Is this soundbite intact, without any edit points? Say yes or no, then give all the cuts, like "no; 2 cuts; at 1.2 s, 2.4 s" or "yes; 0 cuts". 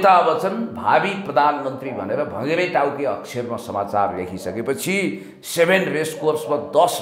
yes; 0 cuts